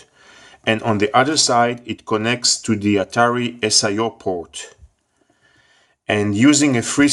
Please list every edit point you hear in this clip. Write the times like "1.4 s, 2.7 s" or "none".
none